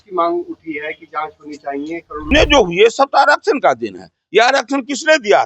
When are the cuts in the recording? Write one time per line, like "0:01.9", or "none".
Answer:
0:02.3